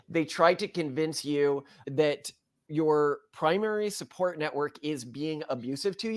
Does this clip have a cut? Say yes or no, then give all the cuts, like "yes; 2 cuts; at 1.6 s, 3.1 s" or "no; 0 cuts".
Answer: yes; 1 cut; at 2.6 s